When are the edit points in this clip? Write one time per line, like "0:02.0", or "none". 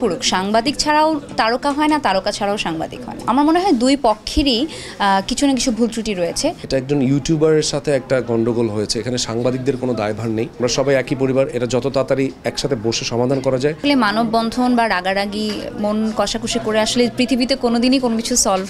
0:03.3
0:06.6
0:10.5
0:13.8